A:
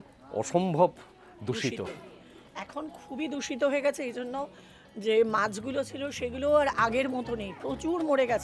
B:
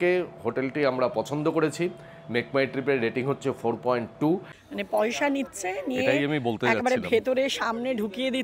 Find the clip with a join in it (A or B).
B